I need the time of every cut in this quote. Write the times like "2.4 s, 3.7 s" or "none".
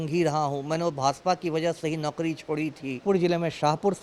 3.0 s